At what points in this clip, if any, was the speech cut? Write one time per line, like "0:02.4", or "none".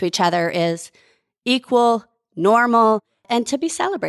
0:03.2